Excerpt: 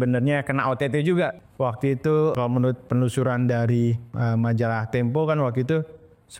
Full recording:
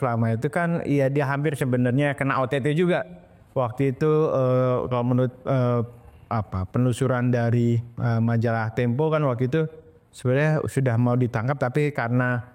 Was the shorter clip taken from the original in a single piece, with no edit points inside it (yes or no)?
no